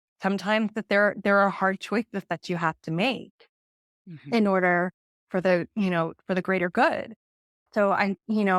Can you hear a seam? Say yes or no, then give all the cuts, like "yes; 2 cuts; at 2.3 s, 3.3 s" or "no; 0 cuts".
no; 0 cuts